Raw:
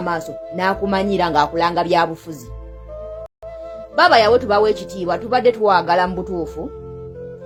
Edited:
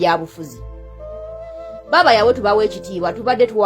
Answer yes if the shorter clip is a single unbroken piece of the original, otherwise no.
no